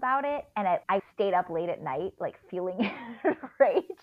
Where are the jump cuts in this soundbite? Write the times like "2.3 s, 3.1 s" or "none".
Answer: none